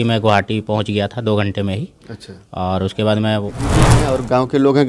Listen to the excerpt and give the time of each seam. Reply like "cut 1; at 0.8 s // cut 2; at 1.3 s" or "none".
cut 1; at 4.0 s